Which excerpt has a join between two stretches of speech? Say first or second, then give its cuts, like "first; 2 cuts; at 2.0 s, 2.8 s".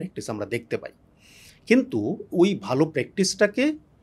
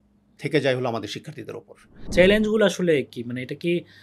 second; 1 cut; at 1.9 s